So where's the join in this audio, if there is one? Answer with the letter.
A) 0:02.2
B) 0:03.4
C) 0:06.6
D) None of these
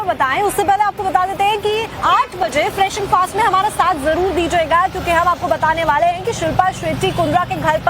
B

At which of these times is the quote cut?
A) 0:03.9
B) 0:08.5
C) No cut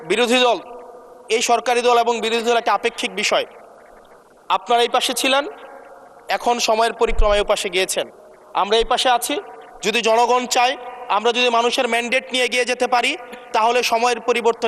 C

